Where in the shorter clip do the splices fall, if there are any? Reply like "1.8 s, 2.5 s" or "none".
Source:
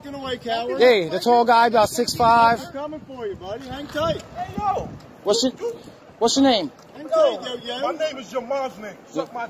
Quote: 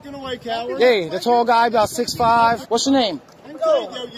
2.6 s

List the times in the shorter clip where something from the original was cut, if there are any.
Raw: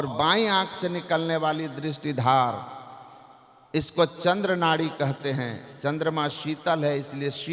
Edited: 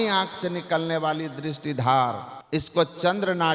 2.3 s

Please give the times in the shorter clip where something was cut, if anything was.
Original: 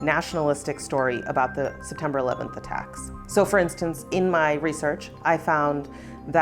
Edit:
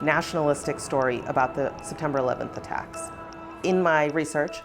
3.3 s

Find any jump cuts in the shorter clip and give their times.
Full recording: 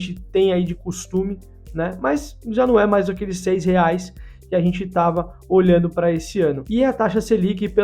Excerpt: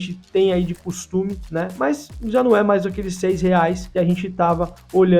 1.4 s, 3.8 s

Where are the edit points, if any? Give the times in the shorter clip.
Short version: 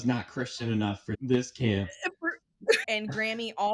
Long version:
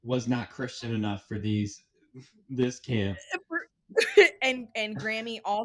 1.1 s, 2.8 s

